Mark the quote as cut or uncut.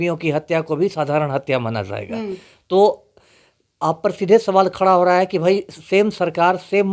uncut